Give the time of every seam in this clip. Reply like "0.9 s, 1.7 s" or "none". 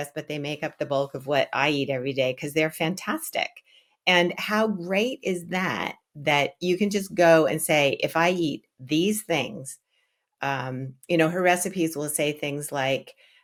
none